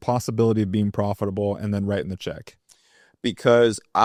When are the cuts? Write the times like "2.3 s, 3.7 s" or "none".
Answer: none